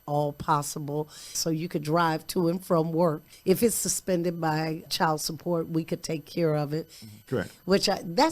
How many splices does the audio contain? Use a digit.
3